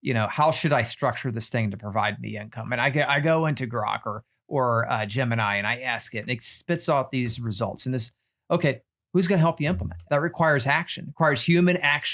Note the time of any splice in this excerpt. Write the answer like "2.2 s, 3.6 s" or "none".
8.9 s, 9.9 s